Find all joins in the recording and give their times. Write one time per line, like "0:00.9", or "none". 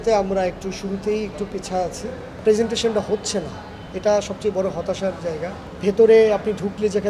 0:02.4
0:05.7

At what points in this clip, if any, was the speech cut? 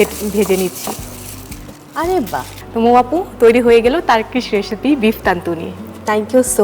0:02.6

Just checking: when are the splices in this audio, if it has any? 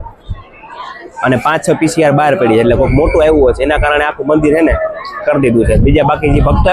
none

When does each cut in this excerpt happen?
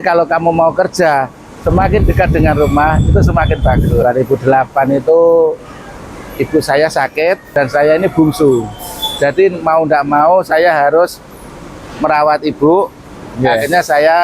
0:04.0
0:07.4

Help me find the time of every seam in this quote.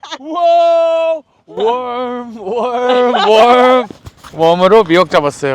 0:01.4

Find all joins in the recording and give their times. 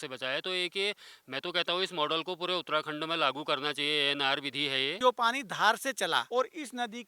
0:04.9
0:06.3

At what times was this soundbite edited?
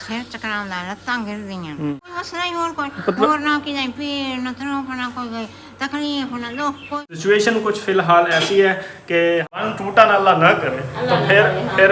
0:02.1
0:07.0
0:09.6

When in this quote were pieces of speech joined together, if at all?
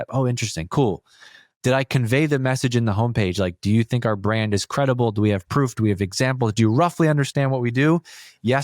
none

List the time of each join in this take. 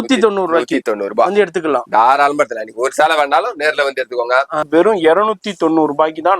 0:04.7

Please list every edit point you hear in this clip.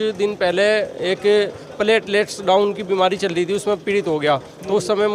none

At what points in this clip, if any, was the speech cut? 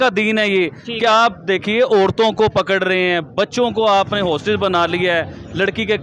none

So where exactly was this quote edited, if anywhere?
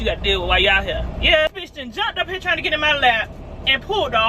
0:01.5

